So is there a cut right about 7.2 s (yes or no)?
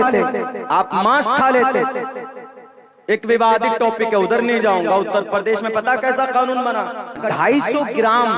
yes